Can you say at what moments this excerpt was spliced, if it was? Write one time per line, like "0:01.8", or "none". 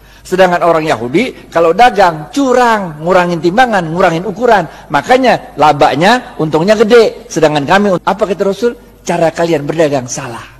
0:08.0